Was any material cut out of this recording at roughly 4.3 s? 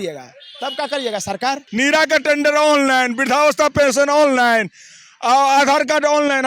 no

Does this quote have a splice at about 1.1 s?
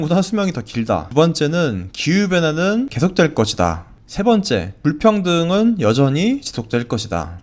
yes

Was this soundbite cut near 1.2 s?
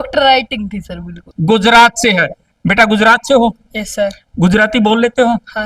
yes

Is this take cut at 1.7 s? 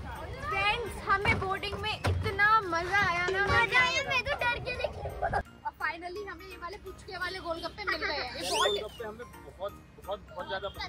no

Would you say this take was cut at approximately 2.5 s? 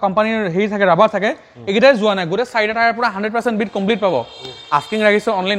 no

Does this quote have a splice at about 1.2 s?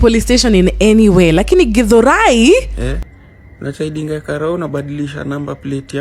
no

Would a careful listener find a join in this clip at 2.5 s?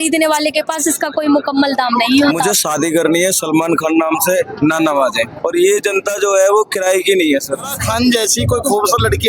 yes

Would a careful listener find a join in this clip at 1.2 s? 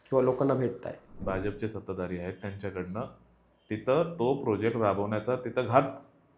yes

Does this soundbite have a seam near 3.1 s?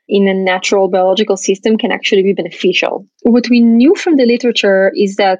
yes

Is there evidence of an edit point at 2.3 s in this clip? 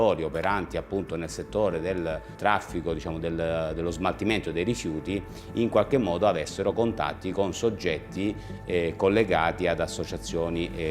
yes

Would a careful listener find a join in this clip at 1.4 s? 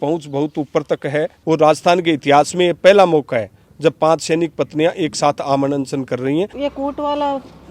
yes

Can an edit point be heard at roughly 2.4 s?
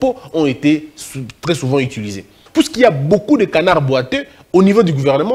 yes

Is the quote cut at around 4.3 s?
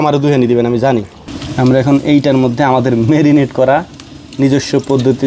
no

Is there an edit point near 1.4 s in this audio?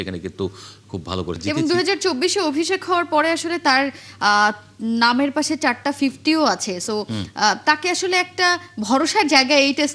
yes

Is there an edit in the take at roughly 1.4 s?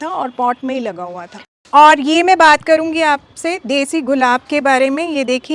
yes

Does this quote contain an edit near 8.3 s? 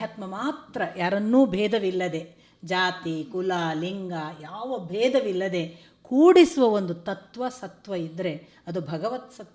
no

